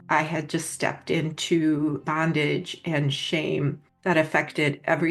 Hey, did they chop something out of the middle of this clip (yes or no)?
yes